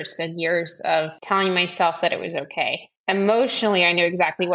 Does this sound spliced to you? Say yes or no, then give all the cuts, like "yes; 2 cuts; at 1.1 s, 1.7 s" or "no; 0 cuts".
yes; 2 cuts; at 1.2 s, 2.9 s